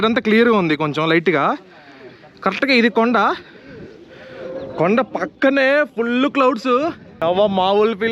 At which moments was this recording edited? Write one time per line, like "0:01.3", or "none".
0:07.1